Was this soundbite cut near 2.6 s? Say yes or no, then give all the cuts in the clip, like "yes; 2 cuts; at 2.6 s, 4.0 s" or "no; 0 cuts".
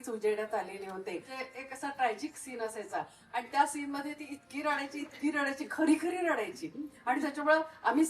no; 1 cut; at 1.3 s